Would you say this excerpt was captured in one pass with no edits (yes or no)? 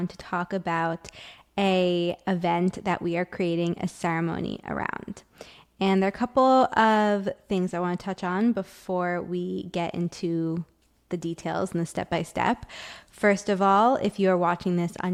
yes